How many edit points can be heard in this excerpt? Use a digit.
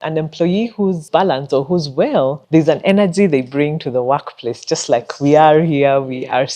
2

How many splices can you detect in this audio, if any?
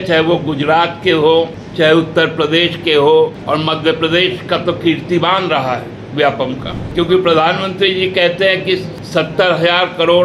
4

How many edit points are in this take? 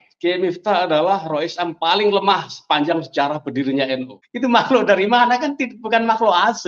1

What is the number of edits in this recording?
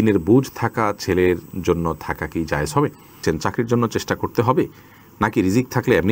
1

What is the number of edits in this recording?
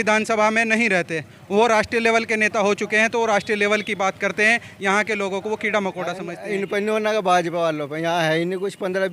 1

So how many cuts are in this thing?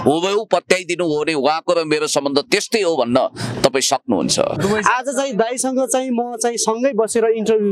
1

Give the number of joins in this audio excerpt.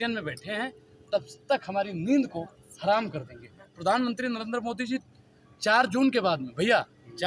0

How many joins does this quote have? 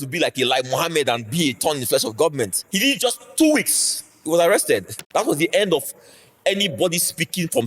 2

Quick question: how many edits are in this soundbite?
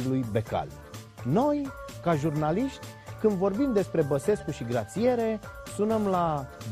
1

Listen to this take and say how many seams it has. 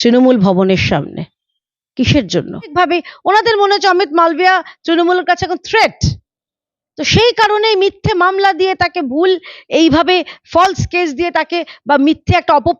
1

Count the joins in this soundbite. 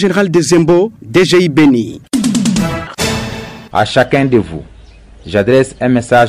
1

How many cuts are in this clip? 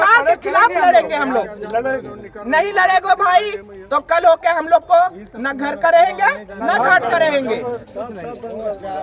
0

